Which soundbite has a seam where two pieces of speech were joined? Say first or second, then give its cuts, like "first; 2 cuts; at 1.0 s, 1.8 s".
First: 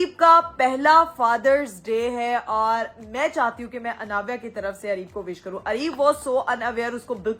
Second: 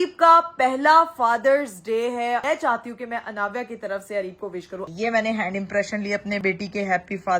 second; 3 cuts; at 2.4 s, 4.8 s, 6.4 s